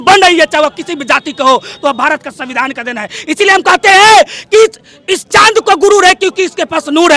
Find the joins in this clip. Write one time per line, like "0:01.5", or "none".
none